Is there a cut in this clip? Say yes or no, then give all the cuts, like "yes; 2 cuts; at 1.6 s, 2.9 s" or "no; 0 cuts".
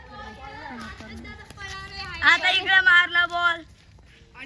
no; 0 cuts